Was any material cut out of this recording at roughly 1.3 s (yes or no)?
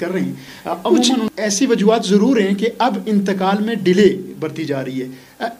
yes